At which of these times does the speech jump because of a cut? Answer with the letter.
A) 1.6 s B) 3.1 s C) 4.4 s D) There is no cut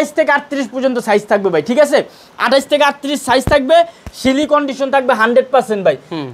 D